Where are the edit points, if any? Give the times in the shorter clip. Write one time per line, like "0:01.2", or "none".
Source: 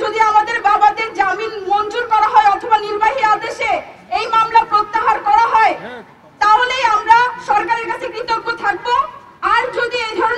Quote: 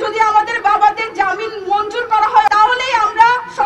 0:02.5